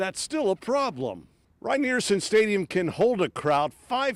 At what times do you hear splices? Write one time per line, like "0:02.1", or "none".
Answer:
none